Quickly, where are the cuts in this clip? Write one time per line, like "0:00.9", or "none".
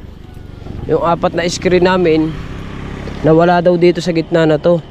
none